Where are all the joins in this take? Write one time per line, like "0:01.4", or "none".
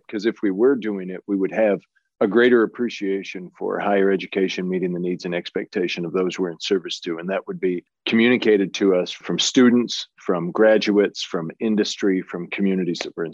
none

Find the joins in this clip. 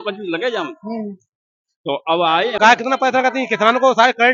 0:02.6

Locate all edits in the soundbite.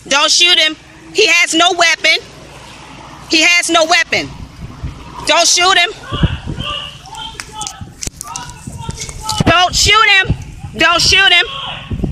none

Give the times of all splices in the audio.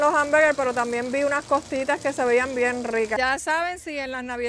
0:03.2

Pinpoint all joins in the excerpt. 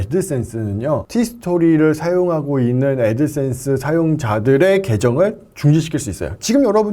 0:01.1

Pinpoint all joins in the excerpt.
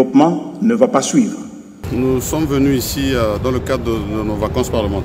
0:01.7

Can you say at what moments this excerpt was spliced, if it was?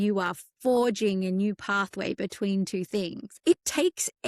0:03.3

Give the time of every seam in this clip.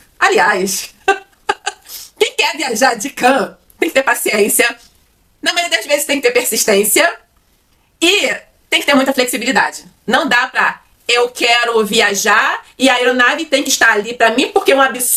none

